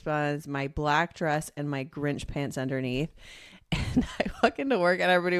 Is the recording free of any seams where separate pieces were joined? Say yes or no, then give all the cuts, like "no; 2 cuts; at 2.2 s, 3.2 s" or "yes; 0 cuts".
yes; 0 cuts